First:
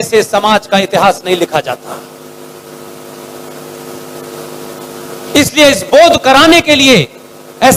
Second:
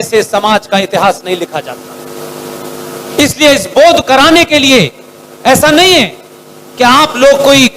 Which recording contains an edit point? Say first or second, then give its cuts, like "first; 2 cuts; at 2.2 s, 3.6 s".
second; 1 cut; at 1.8 s